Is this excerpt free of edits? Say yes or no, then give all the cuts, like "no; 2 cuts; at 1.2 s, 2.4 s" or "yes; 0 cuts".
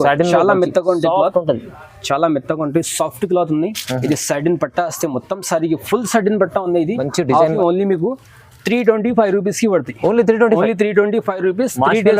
no; 1 cut; at 7.5 s